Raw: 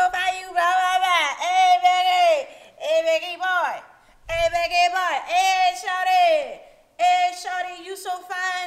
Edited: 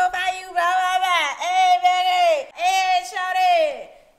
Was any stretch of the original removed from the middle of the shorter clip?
yes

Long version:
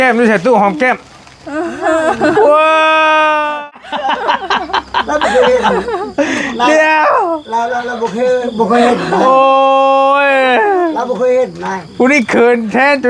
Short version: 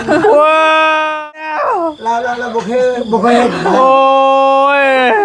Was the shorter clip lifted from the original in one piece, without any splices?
no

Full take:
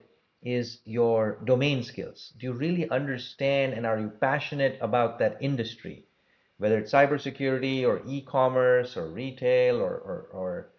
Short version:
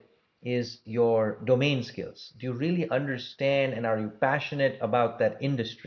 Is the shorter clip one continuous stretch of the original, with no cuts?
yes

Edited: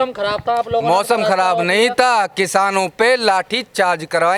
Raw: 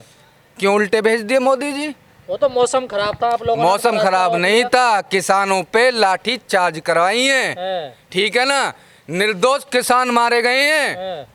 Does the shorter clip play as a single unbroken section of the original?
yes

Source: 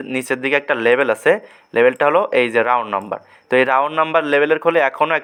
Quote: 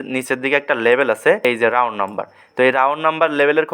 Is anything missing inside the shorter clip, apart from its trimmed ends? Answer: yes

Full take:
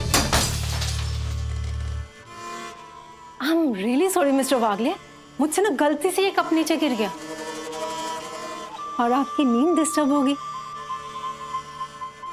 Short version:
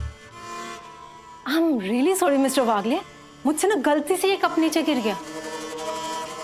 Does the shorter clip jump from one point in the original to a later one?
no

